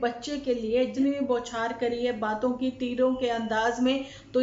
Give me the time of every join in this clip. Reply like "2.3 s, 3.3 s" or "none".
0.9 s